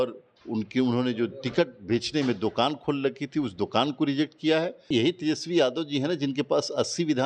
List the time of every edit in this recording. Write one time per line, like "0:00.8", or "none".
0:04.9